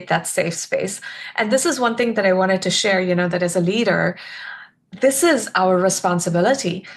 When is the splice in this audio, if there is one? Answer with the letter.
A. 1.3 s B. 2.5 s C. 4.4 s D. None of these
D